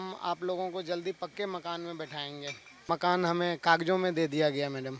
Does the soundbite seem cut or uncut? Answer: cut